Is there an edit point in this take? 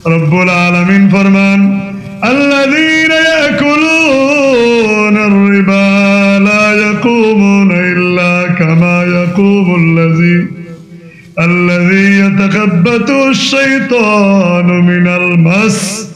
no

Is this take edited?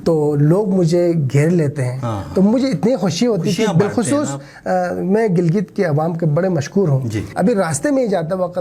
yes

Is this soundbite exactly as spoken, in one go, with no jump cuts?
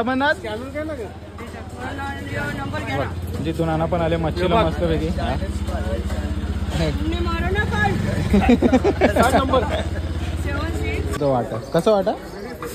no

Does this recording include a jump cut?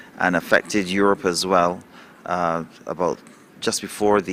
no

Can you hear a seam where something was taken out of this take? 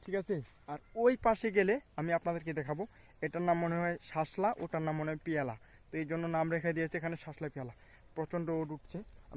no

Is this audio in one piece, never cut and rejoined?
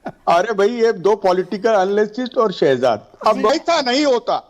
no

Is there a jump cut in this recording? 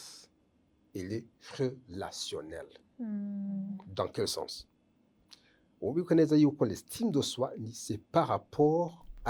no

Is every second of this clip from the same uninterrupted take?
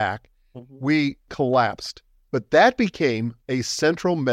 no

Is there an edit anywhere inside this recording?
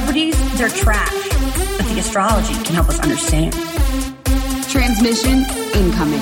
no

